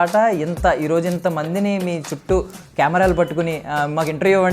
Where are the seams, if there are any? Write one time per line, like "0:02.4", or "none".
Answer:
none